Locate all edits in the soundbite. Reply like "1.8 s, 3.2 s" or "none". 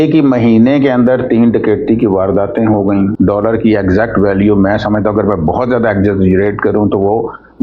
3.1 s